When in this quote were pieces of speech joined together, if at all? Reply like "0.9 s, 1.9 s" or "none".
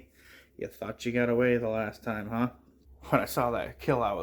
2.9 s